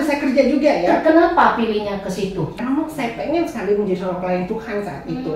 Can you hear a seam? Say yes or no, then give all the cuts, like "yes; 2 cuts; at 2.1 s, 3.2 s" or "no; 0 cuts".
yes; 1 cut; at 2.6 s